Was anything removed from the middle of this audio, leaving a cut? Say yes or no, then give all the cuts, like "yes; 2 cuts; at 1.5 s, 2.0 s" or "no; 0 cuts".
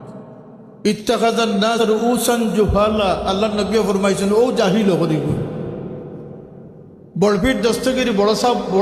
yes; 1 cut; at 1.8 s